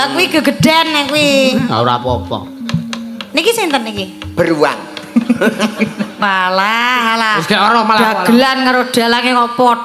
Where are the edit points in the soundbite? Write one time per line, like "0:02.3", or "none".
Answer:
0:06.2